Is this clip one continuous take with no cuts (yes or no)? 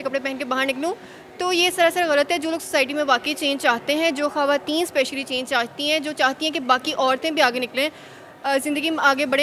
yes